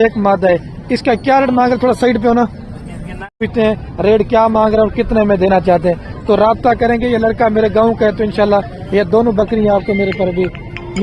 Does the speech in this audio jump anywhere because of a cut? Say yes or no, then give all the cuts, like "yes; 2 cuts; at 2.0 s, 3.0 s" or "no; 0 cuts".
yes; 1 cut; at 3.4 s